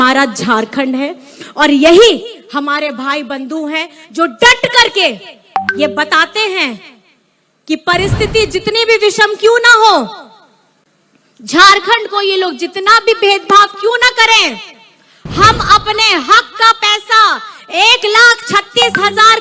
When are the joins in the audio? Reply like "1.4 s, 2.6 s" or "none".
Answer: none